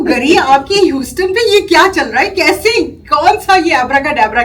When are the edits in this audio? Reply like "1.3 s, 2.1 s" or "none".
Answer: none